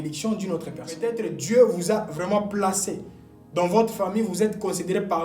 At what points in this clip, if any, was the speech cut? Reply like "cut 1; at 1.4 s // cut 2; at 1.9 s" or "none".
cut 1; at 1.1 s